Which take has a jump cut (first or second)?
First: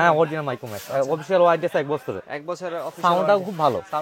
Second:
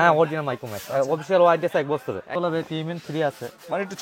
second